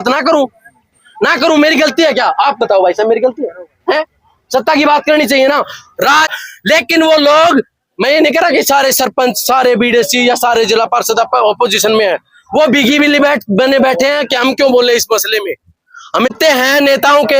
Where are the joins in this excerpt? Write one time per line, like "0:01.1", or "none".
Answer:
0:06.3
0:16.3